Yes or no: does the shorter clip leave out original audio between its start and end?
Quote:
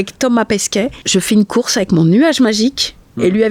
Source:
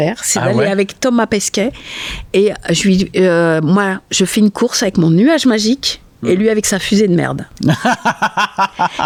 yes